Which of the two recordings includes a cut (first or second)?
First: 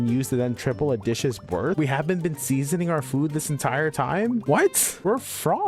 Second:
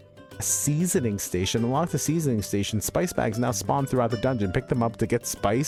first